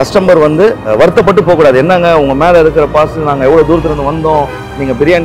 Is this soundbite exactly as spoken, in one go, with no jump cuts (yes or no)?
no